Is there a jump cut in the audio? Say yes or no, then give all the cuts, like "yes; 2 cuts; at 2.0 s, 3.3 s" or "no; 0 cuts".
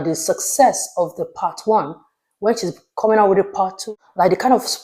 yes; 1 cut; at 3.8 s